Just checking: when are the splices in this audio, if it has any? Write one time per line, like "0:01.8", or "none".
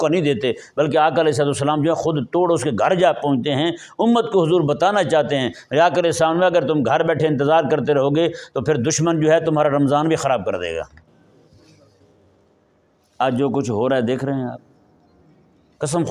none